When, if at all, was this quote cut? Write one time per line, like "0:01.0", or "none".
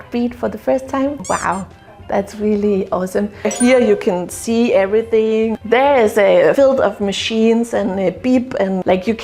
0:03.4
0:05.5